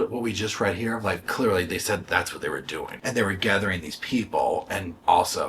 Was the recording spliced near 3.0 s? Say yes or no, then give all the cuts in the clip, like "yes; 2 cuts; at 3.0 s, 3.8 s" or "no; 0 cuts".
yes; 2 cuts; at 1.2 s, 3.0 s